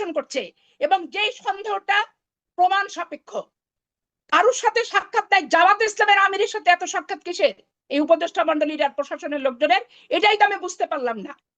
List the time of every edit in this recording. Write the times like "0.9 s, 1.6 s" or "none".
none